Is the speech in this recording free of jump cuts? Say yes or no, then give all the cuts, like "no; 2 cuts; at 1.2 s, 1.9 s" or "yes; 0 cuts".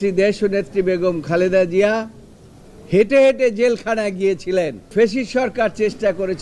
no; 1 cut; at 4.9 s